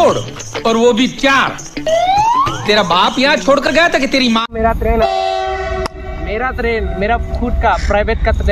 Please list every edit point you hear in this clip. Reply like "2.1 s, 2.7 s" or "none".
4.5 s